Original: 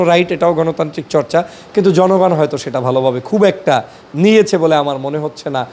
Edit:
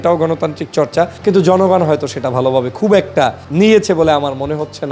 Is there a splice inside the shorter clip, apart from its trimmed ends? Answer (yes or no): yes